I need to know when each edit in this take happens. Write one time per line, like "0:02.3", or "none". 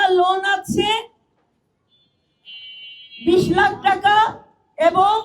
none